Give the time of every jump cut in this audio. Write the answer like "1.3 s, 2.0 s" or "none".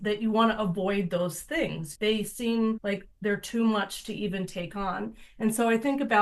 1.9 s, 2.8 s

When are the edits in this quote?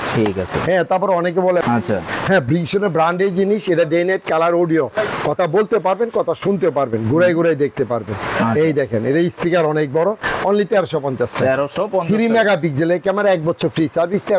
1.6 s

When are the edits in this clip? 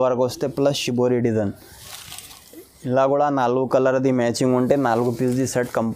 none

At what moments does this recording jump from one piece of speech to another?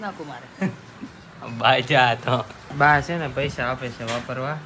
2.6 s

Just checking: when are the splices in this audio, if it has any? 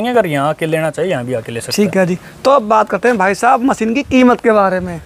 none

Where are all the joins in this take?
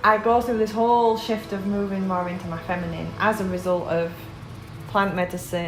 none

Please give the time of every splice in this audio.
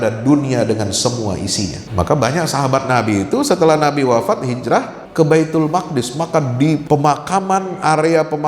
1.8 s, 5.0 s, 6.8 s

